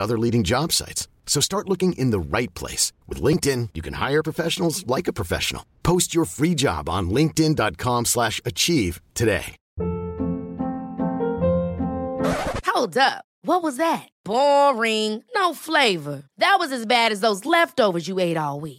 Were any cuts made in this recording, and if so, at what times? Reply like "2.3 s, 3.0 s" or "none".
9.6 s